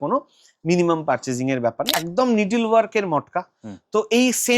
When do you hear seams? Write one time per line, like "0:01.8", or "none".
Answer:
0:01.9